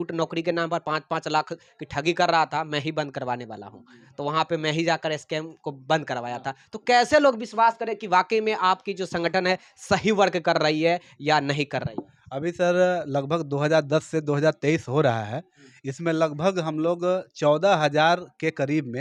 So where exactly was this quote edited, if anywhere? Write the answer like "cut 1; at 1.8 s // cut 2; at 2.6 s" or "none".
none

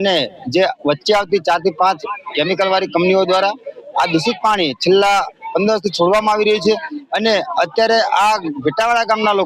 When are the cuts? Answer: cut 1; at 7.0 s

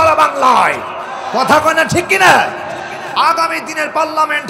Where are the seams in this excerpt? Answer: cut 1; at 3.0 s

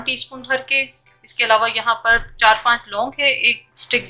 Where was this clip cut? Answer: none

